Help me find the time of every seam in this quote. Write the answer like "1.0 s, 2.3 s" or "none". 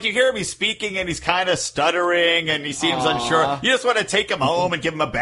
none